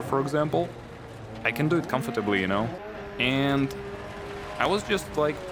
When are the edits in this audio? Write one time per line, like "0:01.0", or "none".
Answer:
0:02.8